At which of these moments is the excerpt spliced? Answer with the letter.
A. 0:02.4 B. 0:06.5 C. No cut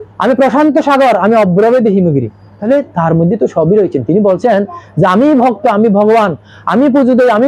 A